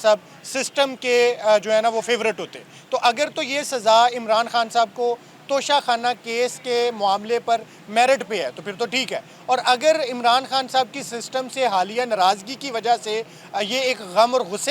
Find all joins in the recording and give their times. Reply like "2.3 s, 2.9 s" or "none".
none

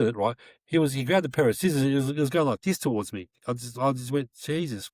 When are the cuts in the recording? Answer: 3.3 s

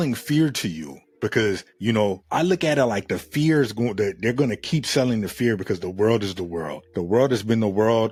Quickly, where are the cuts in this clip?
none

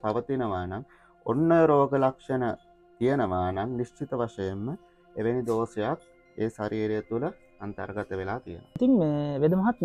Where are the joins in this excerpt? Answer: none

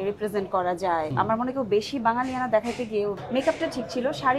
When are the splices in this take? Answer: 1.1 s, 3.2 s

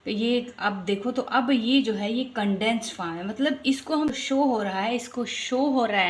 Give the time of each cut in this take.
4.1 s

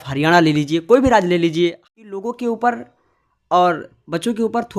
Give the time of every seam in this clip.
1.8 s

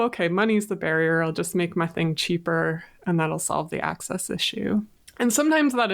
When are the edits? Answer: 5.0 s

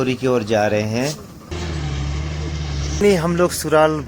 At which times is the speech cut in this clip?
1.5 s, 3.0 s

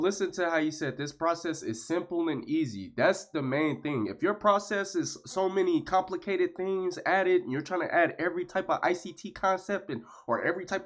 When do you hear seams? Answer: none

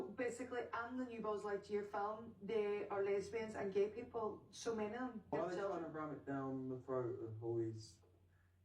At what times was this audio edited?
5.3 s

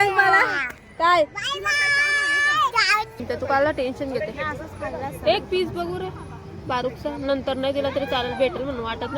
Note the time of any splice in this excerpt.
3.2 s

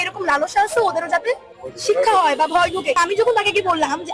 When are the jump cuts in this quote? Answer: 3.0 s

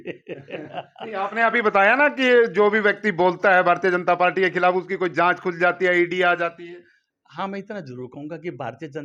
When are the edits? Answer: none

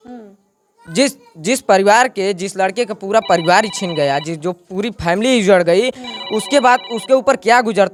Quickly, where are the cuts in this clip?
none

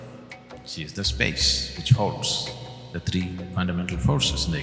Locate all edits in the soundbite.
3.5 s

